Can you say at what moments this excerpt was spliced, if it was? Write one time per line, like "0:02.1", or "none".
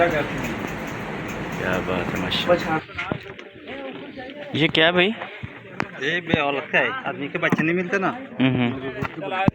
0:02.8